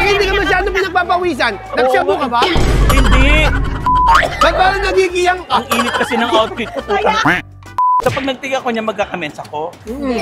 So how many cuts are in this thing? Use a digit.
1